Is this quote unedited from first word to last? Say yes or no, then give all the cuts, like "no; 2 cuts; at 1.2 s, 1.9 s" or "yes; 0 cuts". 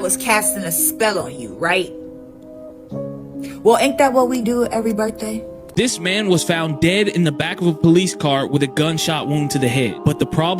no; 1 cut; at 5.6 s